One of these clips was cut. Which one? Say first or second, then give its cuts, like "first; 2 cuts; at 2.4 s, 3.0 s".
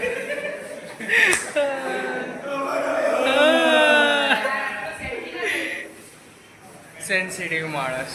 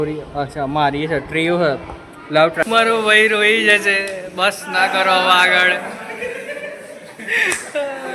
second; 1 cut; at 2.6 s